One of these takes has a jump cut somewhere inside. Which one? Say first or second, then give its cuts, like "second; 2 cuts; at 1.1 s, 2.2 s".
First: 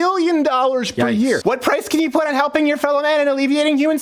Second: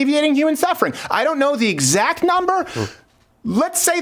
first; 1 cut; at 1.4 s